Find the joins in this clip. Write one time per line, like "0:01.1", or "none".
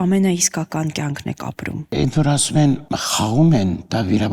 0:01.9
0:02.9